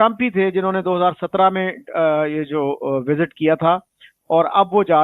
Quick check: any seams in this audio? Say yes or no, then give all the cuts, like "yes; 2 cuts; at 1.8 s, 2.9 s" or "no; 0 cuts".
no; 0 cuts